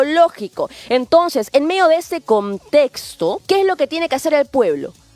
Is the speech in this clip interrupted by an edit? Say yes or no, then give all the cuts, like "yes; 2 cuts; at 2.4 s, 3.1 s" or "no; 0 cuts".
yes; 1 cut; at 3.4 s